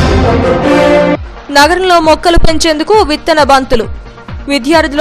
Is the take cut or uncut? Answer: cut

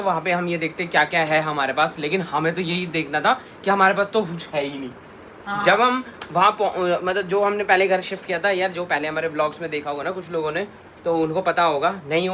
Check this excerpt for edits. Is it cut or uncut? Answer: uncut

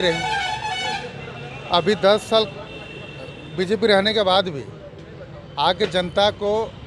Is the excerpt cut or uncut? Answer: uncut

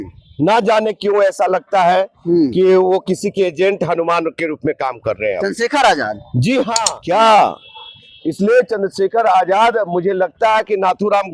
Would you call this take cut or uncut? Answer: cut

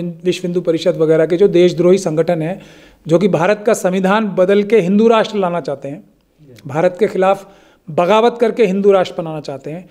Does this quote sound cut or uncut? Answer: uncut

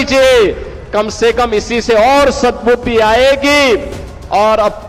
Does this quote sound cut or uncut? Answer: uncut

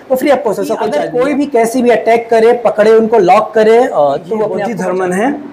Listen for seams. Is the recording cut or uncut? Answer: cut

